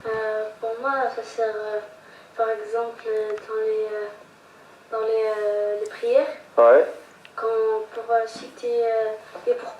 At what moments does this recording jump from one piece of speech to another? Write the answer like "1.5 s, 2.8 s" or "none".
1.6 s